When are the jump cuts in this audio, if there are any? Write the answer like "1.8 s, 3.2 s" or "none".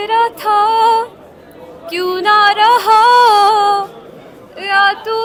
none

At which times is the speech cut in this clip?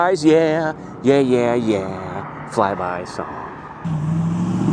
3.8 s

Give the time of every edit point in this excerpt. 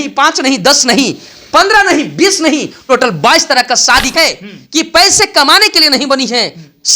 4.1 s

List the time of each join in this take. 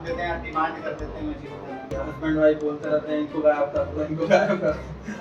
1.9 s

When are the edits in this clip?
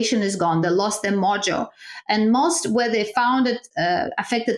3.7 s

